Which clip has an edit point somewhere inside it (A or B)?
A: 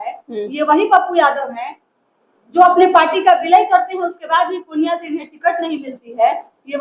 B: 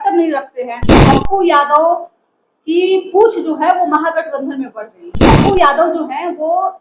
B